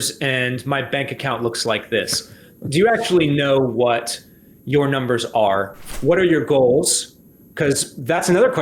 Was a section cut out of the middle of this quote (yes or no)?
yes